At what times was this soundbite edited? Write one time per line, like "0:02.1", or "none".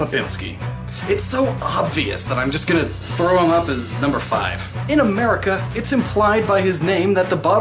none